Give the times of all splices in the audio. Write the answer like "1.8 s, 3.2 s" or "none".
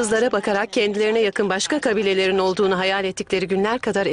3.0 s

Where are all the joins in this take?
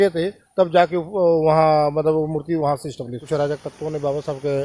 3.2 s

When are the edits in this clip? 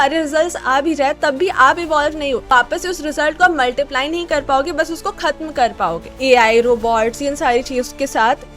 2.4 s, 6.1 s

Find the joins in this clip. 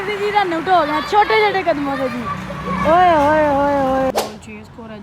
4.1 s

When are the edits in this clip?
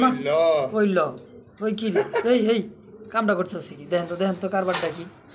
none

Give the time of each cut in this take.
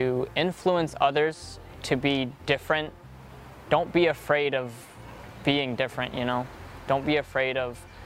none

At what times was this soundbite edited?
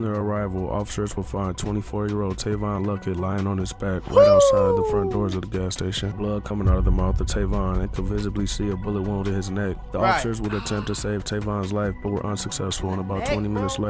6.1 s

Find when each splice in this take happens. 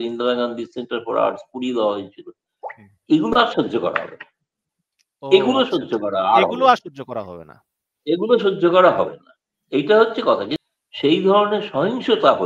10.6 s

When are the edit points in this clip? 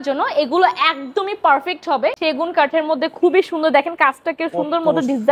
2.2 s

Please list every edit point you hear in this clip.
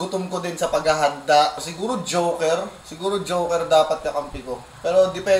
1.7 s

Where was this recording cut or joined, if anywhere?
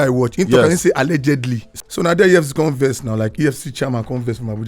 1.6 s

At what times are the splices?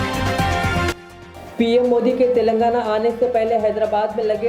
0.9 s

